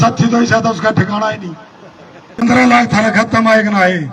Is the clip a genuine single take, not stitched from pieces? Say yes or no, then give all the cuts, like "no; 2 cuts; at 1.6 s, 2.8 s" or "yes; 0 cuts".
no; 1 cut; at 2.4 s